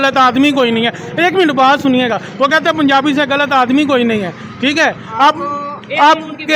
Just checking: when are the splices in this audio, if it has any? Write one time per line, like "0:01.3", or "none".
none

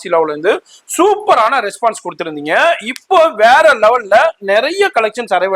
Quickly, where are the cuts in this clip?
none

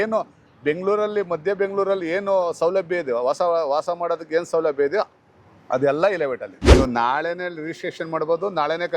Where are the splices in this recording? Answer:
0:06.6

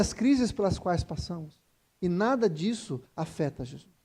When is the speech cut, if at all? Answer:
none

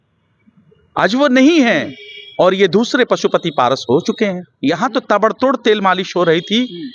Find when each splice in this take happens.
0:04.5

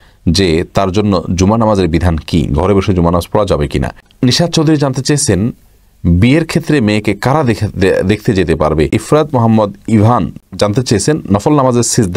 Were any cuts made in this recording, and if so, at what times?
0:04.0
0:08.9

